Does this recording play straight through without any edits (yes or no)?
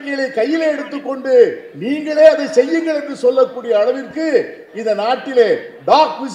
yes